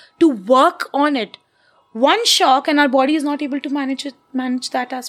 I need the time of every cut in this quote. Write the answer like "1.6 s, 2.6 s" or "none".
none